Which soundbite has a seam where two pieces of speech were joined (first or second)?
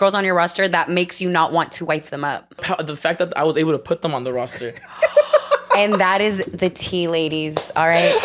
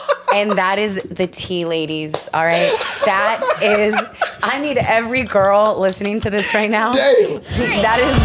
first